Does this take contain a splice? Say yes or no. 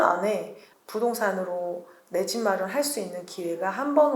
no